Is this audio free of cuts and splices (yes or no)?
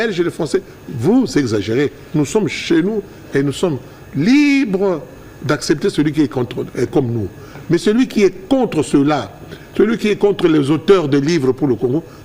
yes